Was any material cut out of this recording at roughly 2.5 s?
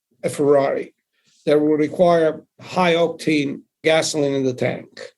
yes; 2 cuts; at 2.5 s, 3.8 s

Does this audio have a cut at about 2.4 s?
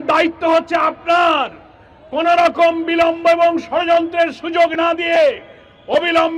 no; 0 cuts

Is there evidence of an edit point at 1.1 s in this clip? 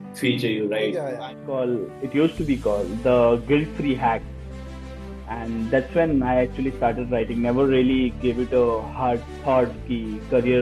yes; 1 cut; at 1.1 s

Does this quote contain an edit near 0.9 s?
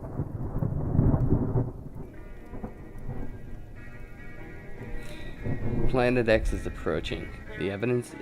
yes; 1 cut; at 0.9 s

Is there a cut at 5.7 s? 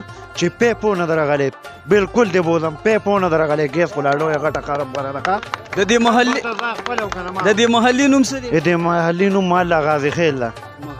no; 0 cuts

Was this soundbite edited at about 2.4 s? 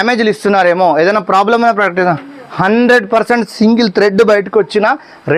no; 0 cuts

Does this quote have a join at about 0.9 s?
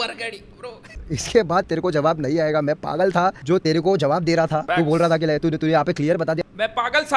yes; 1 cut; at 0.9 s

